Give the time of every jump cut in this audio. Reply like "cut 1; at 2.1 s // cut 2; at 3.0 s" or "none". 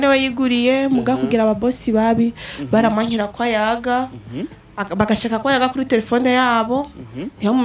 none